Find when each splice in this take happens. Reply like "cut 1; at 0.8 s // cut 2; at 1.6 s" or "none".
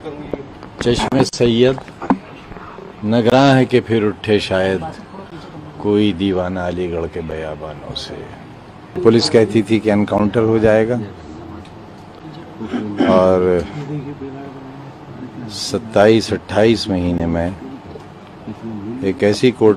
cut 1; at 9.0 s